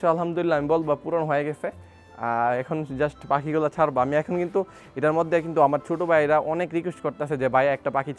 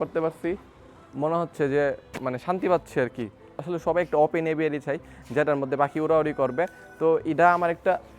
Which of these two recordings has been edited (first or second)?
second